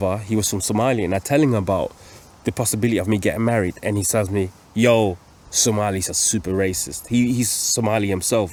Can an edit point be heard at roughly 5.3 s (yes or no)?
no